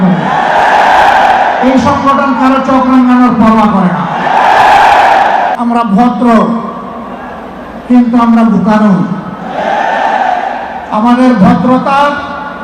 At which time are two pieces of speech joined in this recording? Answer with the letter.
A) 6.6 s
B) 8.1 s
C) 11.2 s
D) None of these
D